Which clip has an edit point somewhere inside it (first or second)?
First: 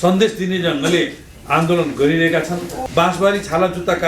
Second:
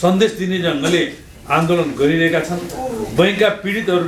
first